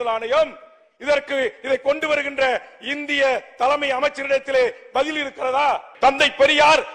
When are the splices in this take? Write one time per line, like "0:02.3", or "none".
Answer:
0:05.9